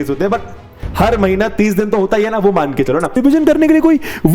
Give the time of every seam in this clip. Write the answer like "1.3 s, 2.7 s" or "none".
3.2 s